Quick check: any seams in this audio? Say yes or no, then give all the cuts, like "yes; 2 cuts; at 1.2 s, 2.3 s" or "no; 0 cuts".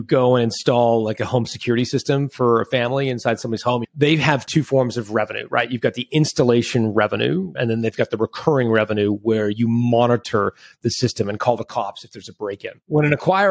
yes; 2 cuts; at 3.9 s, 7.5 s